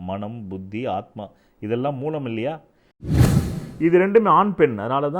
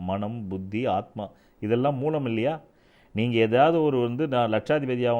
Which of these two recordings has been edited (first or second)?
first